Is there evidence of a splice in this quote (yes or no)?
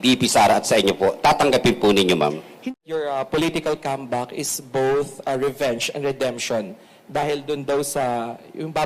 yes